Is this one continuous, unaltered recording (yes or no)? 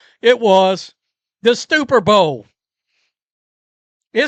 yes